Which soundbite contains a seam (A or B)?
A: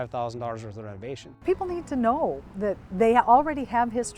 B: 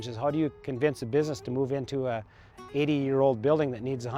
A